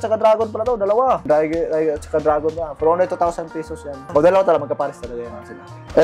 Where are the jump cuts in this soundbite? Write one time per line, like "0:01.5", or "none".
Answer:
none